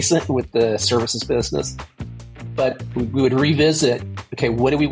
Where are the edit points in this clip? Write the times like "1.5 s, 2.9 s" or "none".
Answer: none